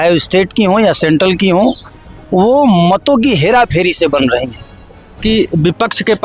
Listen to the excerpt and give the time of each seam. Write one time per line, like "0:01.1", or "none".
0:05.2